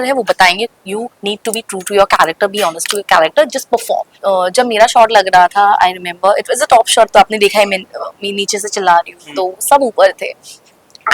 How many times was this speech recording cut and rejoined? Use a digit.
1